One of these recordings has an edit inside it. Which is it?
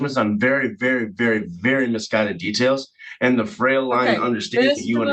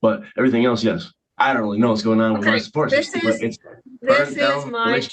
second; 1 cut; at 1.1 s

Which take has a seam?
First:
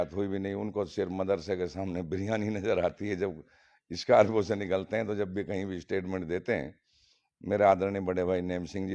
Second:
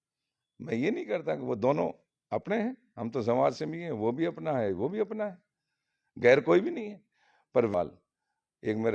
second; 1 cut; at 7.7 s

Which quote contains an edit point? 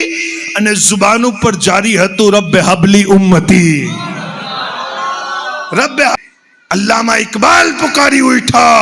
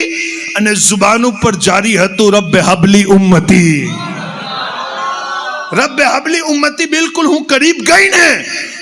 first; 1 cut; at 6.2 s

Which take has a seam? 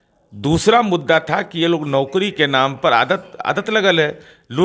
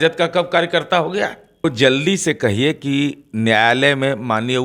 second; 1 cut; at 1.7 s

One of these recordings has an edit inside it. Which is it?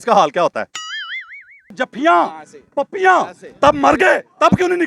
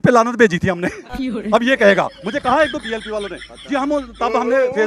first; 1 cut; at 1.7 s

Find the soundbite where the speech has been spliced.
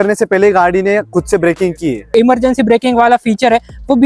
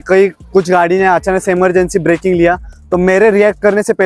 first; 1 cut; at 2.1 s

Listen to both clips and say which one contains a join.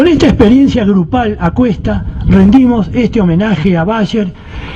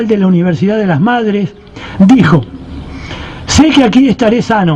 first; 1 cut; at 1.4 s

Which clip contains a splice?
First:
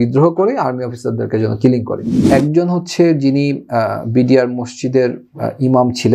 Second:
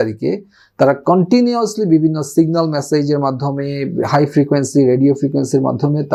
first; 1 cut; at 2.2 s

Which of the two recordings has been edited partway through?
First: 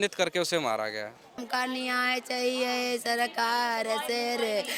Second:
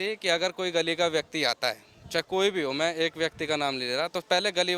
first; 1 cut; at 1.4 s

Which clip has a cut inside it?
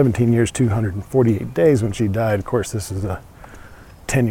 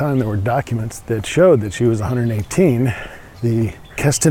second; 2 cuts; at 0.9 s, 3.5 s

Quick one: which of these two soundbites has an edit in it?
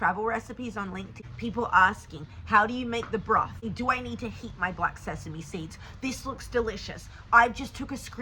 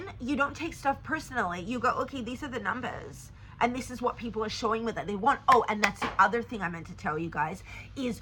first; 2 cuts; at 1.1 s, 3.6 s

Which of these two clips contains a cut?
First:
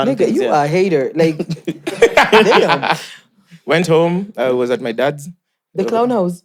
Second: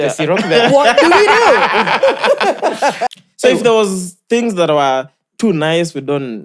second; 1 cut; at 3.0 s

